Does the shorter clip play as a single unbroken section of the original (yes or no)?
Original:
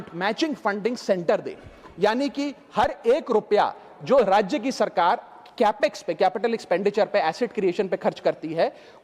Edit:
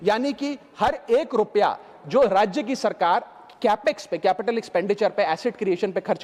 yes